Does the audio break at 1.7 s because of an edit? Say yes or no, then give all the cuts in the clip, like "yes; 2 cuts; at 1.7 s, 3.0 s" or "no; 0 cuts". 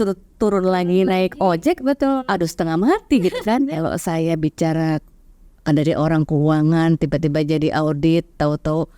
no; 1 cut; at 3.6 s